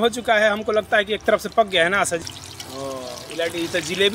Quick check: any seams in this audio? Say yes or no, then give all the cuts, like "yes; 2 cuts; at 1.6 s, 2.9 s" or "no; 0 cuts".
yes; 1 cut; at 2.2 s